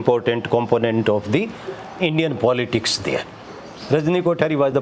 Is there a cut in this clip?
no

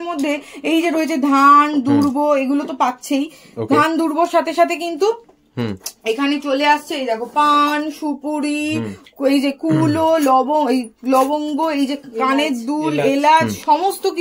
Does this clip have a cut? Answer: no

